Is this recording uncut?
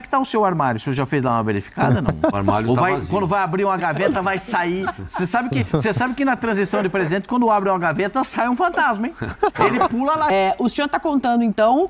no; 1 cut; at 10.3 s

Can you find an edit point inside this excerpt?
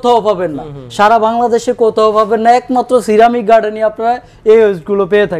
no; 0 cuts

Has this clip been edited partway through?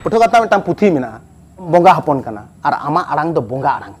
yes; 1 cut; at 1.7 s

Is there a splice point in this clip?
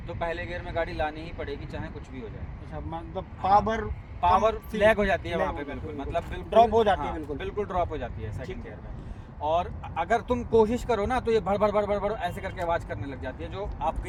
no; 0 cuts

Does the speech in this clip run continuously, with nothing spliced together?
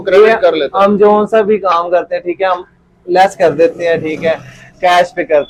yes; 0 cuts

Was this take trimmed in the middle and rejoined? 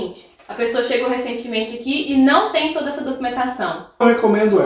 no; 0 cuts

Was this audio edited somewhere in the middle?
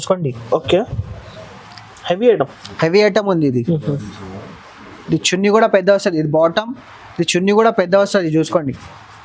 no; 0 cuts

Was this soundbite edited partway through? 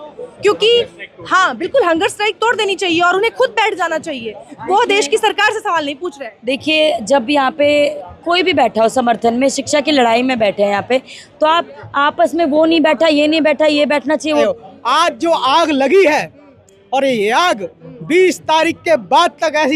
yes; 1 cut; at 14.4 s

